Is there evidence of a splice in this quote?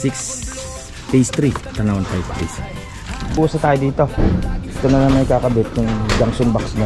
yes; 1 cut; at 3.4 s

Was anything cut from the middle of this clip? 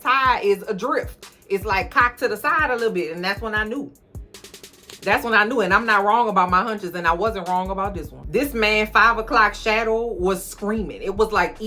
yes; 1 cut; at 8.1 s

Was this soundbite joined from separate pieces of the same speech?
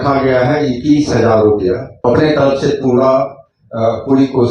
yes; 1 cut; at 1.9 s

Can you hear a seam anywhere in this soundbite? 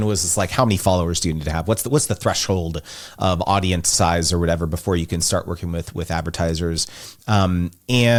no; 0 cuts

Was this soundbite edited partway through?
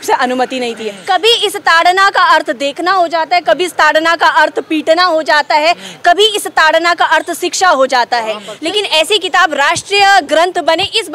yes; 2 cuts; at 0.9 s, 8.5 s

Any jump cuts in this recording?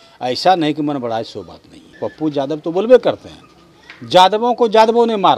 yes; 1 cut; at 1.9 s

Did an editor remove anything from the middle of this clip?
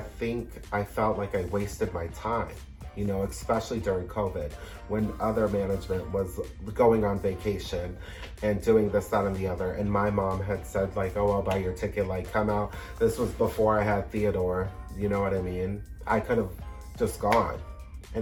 no; 0 cuts

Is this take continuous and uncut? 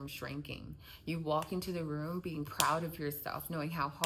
yes; 0 cuts

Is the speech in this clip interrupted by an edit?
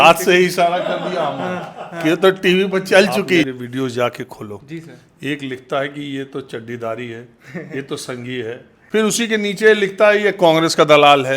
yes; 2 cuts; at 3.5 s, 8.7 s

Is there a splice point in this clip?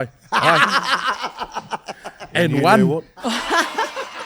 no; 0 cuts

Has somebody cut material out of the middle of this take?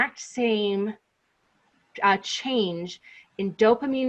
no; 0 cuts

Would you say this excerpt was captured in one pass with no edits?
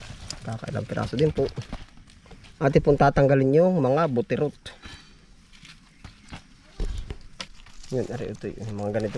no; 1 cut; at 7.5 s

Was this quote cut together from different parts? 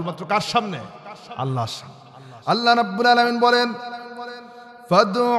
no; 0 cuts

